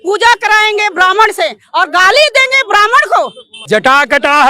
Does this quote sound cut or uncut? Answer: cut